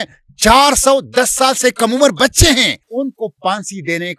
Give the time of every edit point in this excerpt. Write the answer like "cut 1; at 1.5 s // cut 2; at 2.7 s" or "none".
cut 1; at 2.8 s

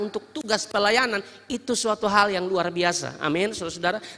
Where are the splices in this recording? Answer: none

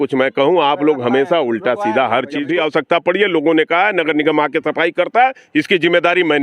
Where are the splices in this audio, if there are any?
cut 1; at 2.4 s

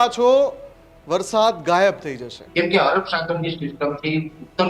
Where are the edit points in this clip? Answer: cut 1; at 2.4 s

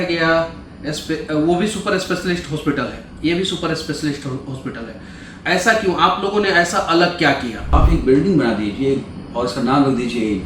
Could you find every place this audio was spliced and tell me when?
cut 1; at 7.7 s

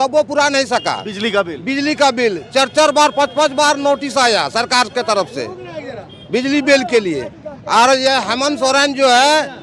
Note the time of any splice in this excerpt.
none

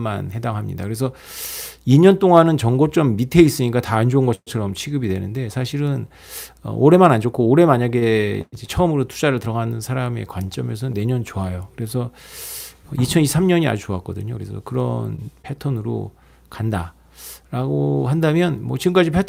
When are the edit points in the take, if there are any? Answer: none

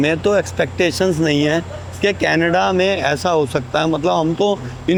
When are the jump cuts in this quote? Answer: none

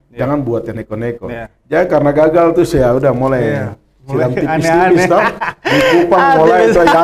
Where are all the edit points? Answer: none

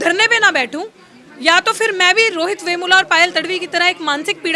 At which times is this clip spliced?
none

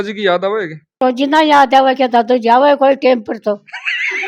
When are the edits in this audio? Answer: cut 1; at 1.0 s

